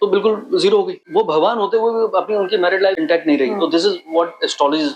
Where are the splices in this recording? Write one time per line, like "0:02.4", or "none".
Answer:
0:01.0
0:03.0

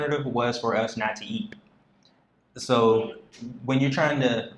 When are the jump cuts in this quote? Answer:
none

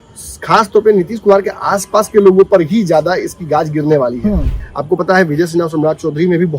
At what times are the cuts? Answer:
0:04.6

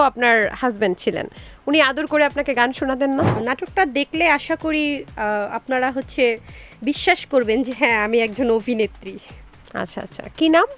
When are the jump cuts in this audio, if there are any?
0:03.4

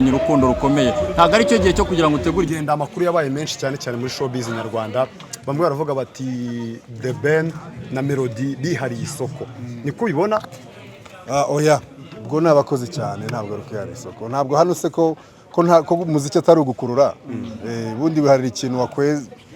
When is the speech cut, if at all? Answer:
0:02.5

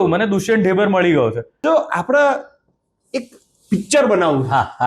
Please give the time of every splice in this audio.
0:01.5

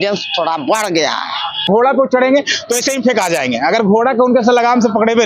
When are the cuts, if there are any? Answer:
0:01.7

